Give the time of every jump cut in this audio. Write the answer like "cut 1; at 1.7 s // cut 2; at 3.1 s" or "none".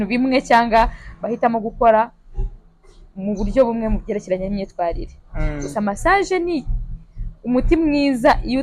none

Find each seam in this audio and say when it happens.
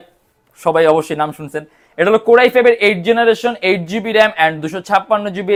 none

